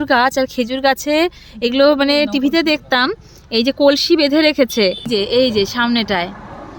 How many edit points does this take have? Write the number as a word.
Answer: one